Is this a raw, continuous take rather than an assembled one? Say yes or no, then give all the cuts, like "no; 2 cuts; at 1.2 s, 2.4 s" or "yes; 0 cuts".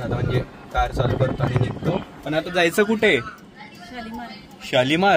yes; 0 cuts